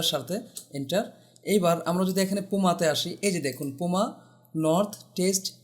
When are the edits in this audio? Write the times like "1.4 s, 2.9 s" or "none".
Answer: none